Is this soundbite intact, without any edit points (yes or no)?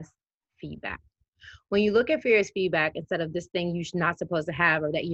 yes